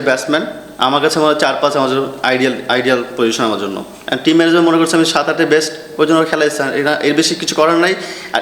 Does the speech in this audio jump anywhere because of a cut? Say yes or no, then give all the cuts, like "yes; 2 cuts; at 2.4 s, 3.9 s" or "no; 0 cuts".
no; 0 cuts